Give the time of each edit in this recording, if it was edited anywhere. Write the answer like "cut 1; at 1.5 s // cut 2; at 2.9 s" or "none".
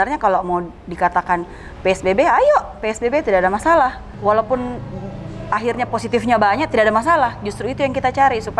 cut 1; at 4.1 s